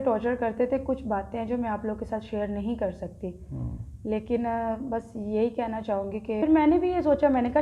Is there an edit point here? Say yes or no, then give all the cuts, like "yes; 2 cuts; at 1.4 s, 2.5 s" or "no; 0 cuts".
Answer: yes; 1 cut; at 6.4 s